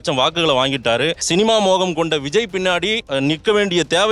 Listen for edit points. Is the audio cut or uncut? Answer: cut